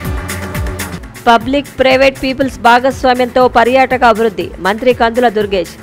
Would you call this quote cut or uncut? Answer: cut